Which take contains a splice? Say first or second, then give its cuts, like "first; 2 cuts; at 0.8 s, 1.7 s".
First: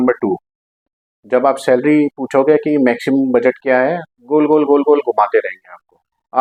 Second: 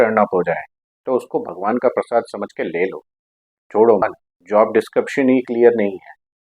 second; 1 cut; at 4.0 s